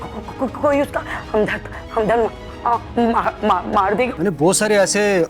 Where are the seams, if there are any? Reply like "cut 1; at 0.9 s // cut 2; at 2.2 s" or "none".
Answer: cut 1; at 4.1 s